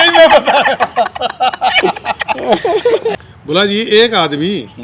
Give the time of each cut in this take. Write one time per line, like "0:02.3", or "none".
0:03.2